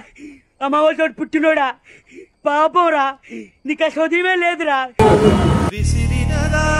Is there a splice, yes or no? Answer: no